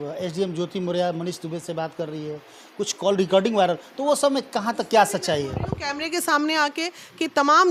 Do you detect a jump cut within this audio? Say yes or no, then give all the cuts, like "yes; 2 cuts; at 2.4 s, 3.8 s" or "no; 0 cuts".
no; 0 cuts